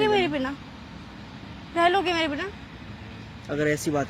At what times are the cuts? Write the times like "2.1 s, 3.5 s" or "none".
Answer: none